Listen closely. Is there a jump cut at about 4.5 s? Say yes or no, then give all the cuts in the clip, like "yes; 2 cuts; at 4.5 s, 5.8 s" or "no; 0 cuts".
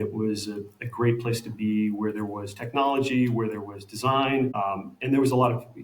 yes; 1 cut; at 4.5 s